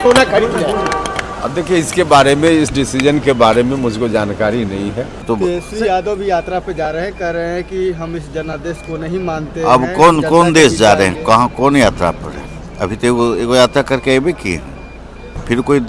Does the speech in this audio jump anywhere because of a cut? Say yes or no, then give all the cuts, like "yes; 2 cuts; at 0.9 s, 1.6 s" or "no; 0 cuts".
yes; 1 cut; at 5.2 s